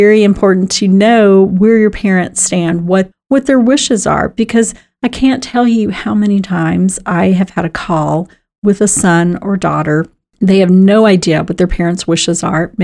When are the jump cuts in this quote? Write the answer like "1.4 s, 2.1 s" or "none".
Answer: 10.2 s